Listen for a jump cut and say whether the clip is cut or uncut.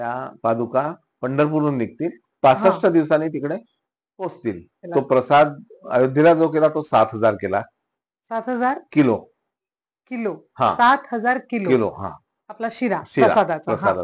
cut